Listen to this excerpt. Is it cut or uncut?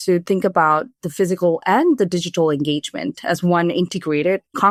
uncut